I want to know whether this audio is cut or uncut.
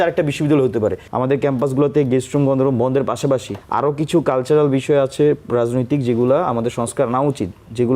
cut